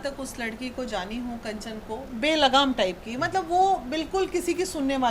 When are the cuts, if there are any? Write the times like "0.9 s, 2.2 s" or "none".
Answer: 2.0 s